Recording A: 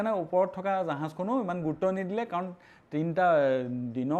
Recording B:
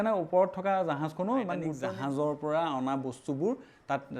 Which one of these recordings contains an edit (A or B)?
B